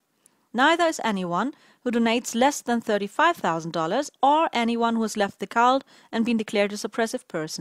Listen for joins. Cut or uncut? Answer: cut